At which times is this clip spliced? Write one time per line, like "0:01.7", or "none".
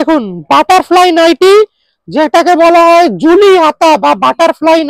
none